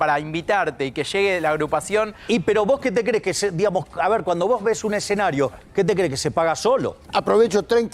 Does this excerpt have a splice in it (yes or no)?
yes